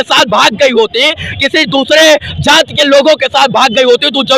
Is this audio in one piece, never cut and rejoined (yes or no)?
yes